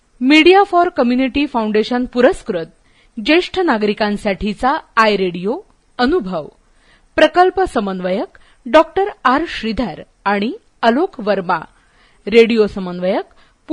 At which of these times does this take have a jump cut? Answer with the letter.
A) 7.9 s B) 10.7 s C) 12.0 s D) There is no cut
D